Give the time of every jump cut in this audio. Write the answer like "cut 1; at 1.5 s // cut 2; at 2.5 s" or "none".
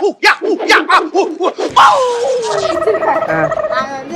cut 1; at 2.5 s